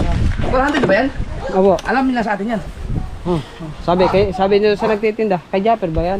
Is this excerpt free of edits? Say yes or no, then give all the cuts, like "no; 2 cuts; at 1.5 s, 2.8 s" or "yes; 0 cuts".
yes; 0 cuts